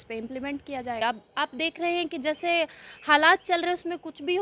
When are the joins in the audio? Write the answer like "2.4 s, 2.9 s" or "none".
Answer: 1.0 s